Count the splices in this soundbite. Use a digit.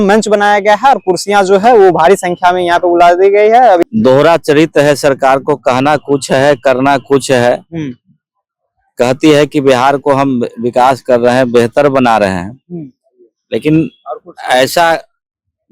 1